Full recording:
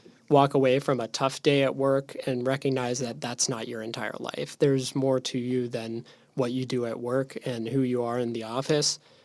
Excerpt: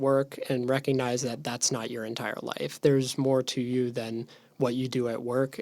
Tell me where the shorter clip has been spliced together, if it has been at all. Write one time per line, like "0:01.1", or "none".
none